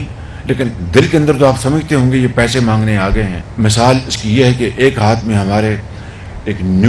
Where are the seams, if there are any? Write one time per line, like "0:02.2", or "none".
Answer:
0:03.4